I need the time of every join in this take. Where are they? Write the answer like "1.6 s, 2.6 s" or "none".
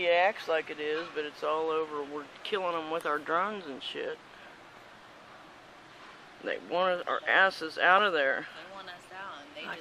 none

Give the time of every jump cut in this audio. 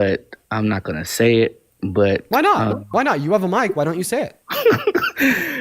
4.4 s

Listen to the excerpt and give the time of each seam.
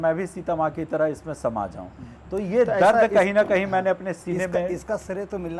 none

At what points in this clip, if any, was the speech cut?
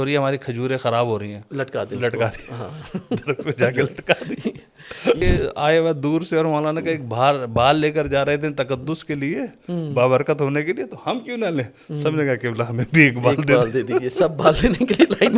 5.2 s

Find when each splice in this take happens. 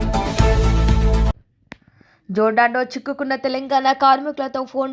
1.5 s

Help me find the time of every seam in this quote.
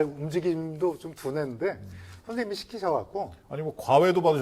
none

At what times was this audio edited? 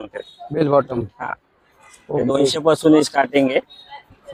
none

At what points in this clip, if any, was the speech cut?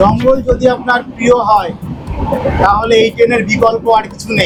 none

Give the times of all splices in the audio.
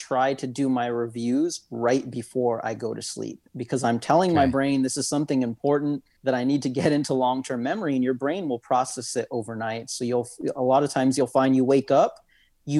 6.1 s

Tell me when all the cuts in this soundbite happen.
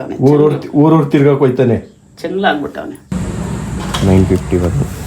3.1 s

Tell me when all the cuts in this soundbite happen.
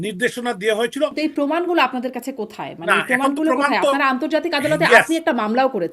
1.1 s

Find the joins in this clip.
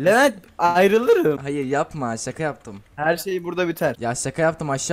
1.4 s, 4.0 s

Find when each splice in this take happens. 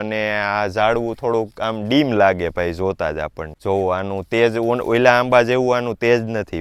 none

